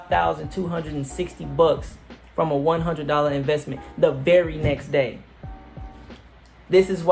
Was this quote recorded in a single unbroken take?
yes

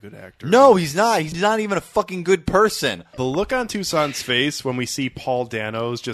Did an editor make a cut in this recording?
yes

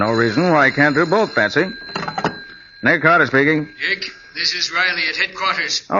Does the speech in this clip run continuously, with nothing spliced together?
no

